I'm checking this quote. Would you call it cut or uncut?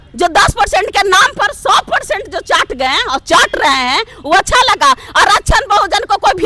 uncut